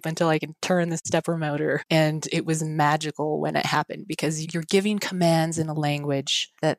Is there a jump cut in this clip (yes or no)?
yes